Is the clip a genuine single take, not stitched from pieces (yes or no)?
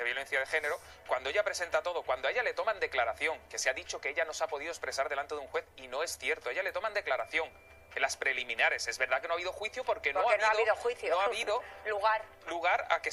yes